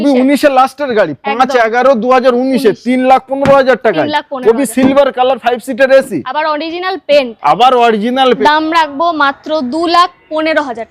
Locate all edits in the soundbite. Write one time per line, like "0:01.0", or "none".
0:08.4